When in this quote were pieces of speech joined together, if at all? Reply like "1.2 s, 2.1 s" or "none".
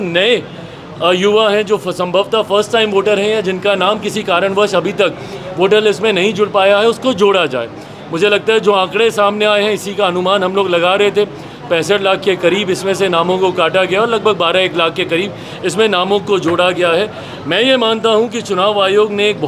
none